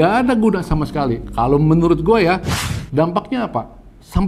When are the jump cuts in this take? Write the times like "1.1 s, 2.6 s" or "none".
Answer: none